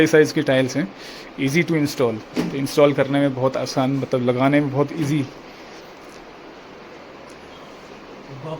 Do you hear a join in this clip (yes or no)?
no